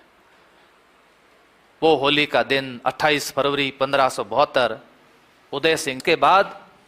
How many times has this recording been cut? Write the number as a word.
one